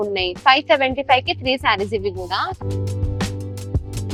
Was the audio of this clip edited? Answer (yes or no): no